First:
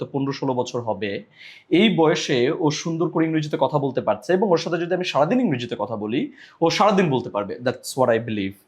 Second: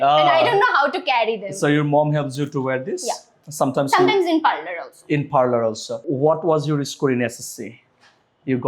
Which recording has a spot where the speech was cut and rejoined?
second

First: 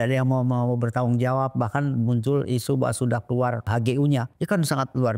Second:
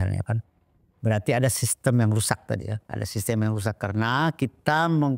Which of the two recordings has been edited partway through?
first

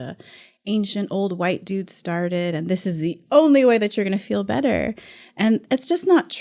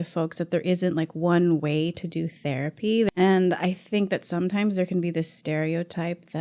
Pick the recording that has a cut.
second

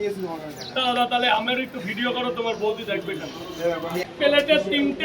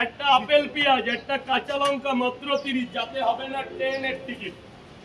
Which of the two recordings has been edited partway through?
first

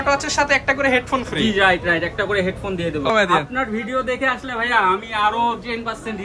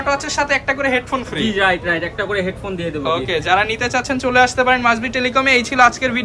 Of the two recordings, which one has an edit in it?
first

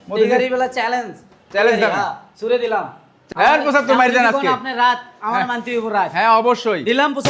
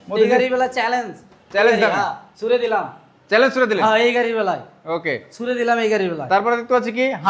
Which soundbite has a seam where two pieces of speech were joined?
first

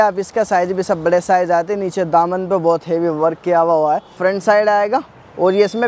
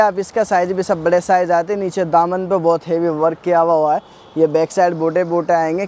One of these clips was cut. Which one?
first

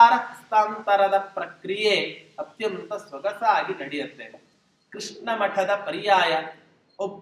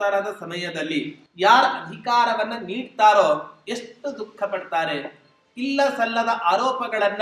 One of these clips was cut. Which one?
second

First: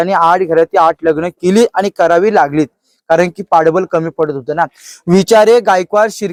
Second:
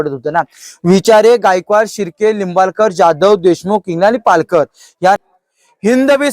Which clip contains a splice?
second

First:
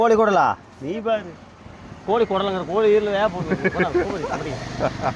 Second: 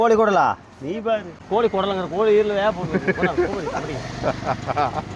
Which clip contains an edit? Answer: second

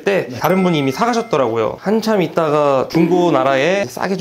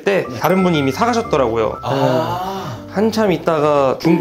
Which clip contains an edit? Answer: first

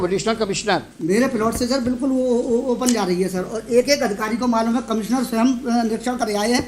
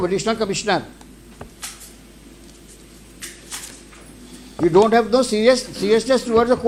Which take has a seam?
first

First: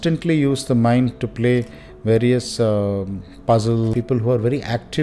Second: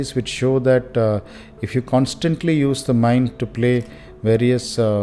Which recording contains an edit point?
first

